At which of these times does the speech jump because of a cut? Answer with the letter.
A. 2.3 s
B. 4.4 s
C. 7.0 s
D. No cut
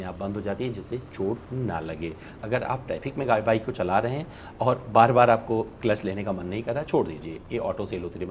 A